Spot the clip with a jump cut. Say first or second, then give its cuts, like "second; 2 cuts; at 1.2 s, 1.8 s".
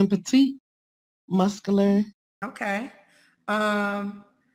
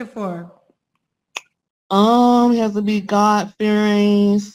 first; 1 cut; at 2.2 s